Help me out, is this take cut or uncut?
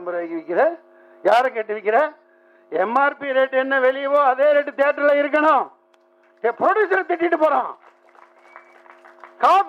uncut